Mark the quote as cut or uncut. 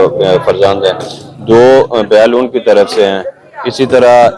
uncut